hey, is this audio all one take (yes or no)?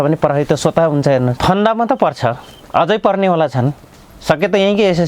no